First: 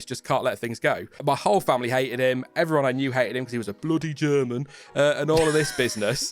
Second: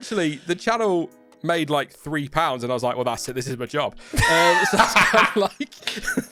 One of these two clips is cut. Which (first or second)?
first